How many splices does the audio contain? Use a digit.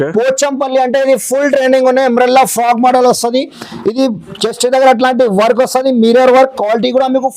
0